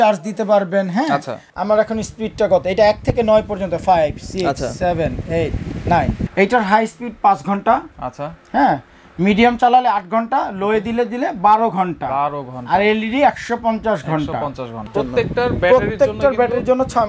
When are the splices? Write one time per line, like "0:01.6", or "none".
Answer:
0:01.4
0:06.3
0:14.8